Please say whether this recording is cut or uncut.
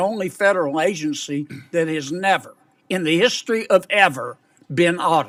uncut